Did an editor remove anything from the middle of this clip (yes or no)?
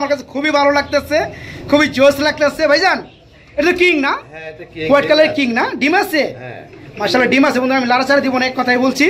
no